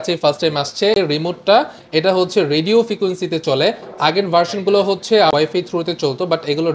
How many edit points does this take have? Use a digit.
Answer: 2